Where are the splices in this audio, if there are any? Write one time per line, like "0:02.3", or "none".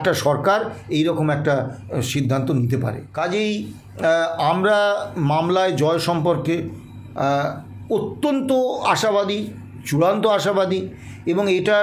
0:03.0